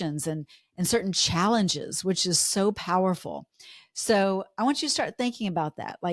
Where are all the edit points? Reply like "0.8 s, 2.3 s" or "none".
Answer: none